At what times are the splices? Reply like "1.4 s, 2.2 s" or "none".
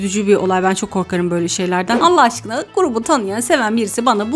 2.0 s

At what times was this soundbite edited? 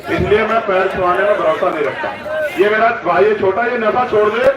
none

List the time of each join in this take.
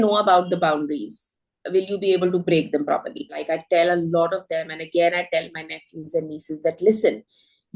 3.4 s

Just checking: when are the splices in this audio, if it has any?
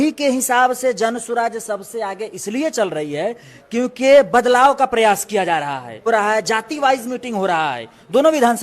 5.9 s

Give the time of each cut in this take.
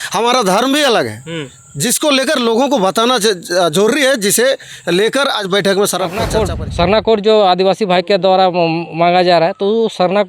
6.2 s

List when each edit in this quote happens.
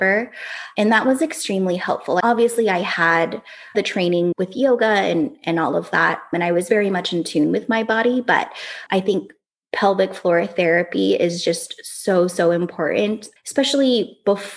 3.7 s

